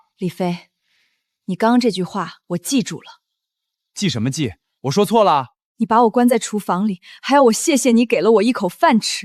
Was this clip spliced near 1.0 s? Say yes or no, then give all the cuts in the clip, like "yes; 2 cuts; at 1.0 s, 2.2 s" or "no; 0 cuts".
no; 0 cuts